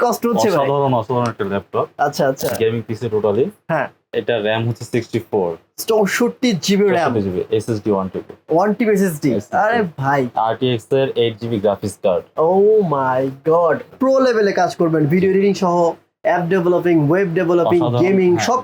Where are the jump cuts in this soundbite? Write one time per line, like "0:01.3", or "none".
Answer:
0:04.0
0:13.8